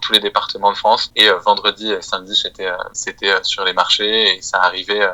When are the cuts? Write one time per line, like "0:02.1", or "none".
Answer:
0:03.0